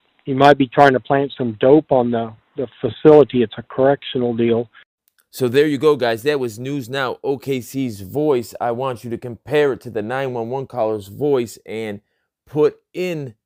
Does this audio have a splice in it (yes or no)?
no